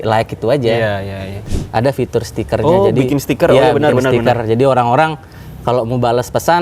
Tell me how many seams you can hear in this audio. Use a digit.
1